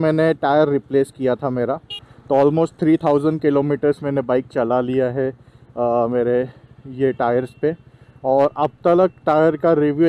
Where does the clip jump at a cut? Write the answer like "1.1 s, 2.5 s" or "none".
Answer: none